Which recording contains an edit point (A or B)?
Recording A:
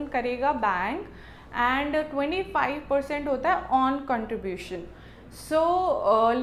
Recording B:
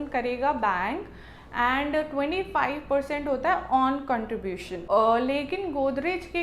B